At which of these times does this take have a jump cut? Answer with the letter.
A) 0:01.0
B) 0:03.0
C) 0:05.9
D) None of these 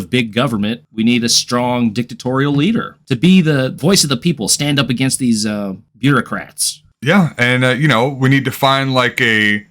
B